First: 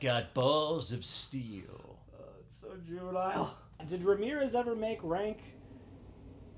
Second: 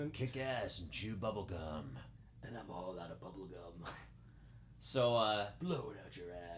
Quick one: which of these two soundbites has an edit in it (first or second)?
first